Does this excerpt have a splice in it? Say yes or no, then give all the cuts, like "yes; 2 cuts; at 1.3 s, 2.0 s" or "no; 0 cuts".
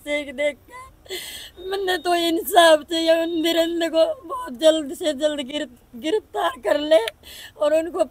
no; 0 cuts